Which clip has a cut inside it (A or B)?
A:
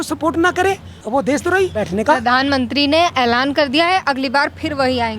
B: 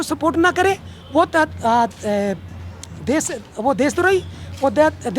A